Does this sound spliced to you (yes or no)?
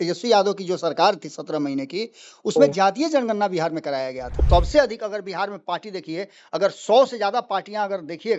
yes